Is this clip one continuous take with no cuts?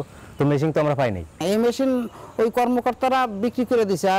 no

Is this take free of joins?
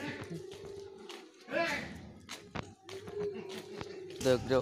yes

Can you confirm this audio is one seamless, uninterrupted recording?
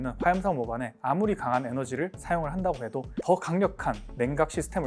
yes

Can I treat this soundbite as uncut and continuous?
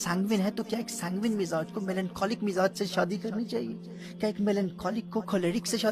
yes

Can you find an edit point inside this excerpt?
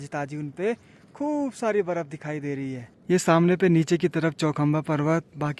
no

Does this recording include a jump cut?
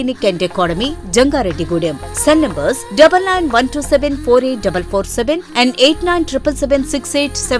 no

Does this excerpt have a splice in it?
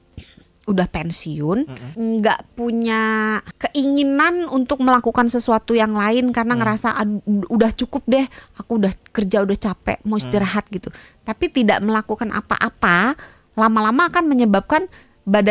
yes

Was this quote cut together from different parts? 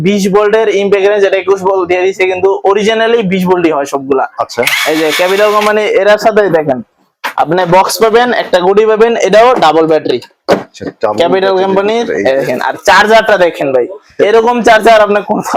no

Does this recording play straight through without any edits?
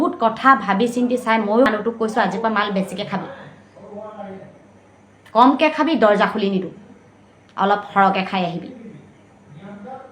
no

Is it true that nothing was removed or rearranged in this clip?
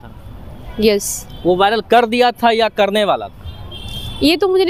yes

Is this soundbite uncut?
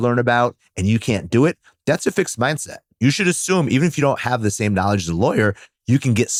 yes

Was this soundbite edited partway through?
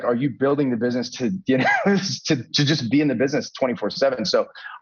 no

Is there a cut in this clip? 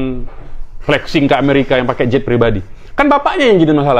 no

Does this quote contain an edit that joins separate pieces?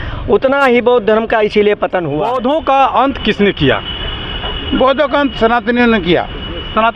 yes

